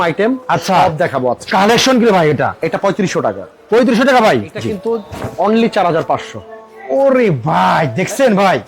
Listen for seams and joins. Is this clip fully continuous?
no; 2 cuts; at 1.4 s, 4.7 s

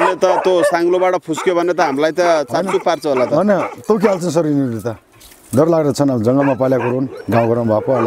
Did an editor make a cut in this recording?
yes; 1 cut; at 7.2 s

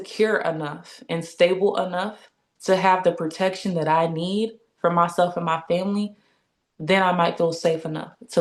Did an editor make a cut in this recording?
no; 0 cuts

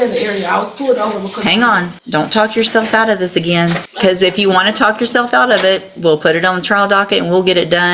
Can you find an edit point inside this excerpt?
yes; 2 cuts; at 2.0 s, 3.9 s

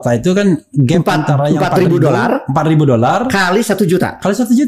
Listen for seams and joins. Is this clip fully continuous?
yes; 0 cuts

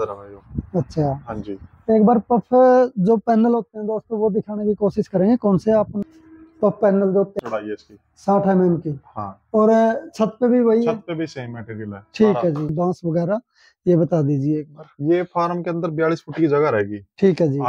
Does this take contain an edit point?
yes; 2 cuts; at 6.0 s, 12.7 s

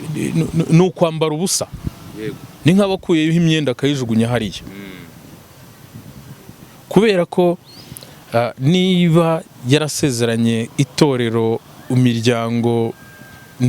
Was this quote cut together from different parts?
no; 0 cuts

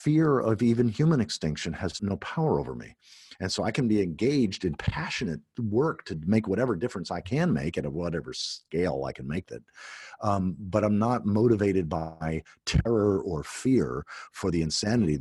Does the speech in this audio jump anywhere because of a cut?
yes; 1 cut; at 1.9 s

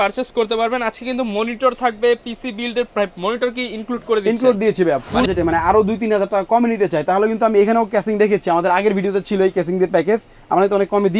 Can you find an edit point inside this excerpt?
yes; 1 cut; at 5.3 s

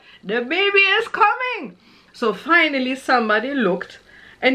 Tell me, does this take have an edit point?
no; 0 cuts

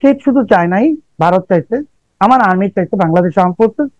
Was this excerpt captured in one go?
no; 1 cut; at 2.0 s

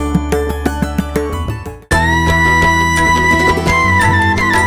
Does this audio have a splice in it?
yes; 1 cut; at 1.7 s

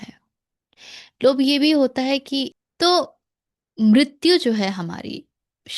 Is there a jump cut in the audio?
yes; 1 cut; at 2.5 s

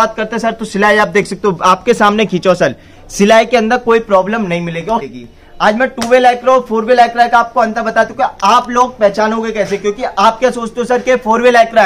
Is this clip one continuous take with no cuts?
no; 1 cut; at 5.1 s

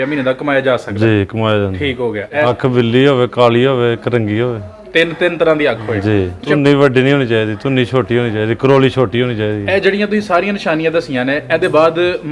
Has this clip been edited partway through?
yes; 2 cuts; at 2.4 s, 6.5 s

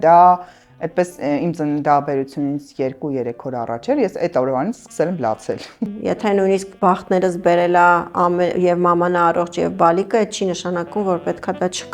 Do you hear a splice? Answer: yes; 2 cuts; at 5.9 s, 6.8 s

